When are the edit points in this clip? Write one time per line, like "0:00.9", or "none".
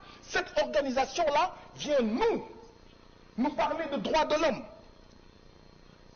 none